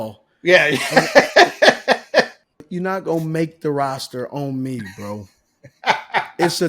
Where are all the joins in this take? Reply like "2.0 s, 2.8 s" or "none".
2.4 s